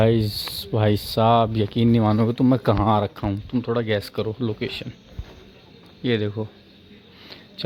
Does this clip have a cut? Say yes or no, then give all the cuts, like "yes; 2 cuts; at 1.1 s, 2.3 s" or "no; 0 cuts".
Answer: no; 0 cuts